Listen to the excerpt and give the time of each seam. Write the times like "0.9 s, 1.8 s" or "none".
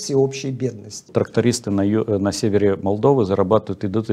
1.1 s